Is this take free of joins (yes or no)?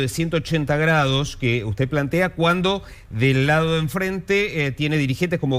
yes